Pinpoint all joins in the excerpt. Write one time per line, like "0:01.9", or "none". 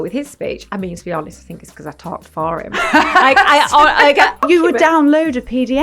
0:04.4